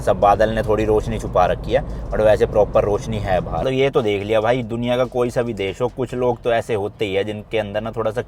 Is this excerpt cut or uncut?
cut